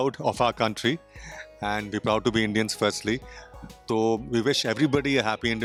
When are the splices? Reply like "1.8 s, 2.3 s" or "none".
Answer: none